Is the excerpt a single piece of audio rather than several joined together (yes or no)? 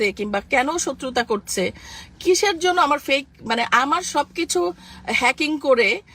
yes